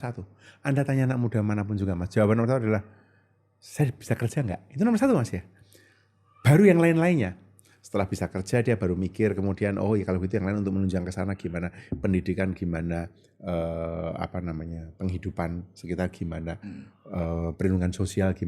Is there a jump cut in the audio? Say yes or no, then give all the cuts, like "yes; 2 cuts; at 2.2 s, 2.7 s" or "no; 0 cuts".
no; 0 cuts